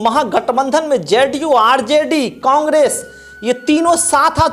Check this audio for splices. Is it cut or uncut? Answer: uncut